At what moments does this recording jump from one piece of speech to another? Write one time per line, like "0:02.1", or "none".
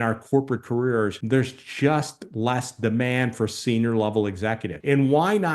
0:01.2
0:04.7